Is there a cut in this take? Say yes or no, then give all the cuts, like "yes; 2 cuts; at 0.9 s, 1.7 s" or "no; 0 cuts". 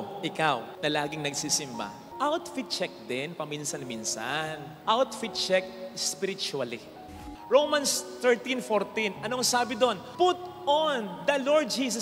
yes; 1 cut; at 7.2 s